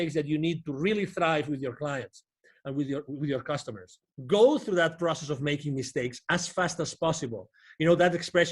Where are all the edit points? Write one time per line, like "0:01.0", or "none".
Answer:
0:04.1